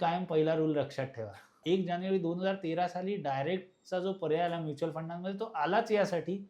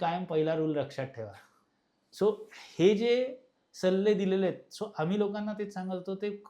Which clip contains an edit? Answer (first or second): first